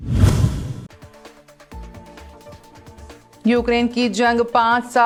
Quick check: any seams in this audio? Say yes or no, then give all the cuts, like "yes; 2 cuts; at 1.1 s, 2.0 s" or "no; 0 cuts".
no; 0 cuts